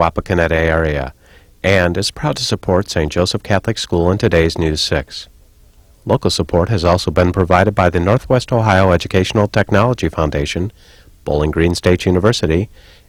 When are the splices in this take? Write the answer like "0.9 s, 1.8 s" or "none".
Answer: none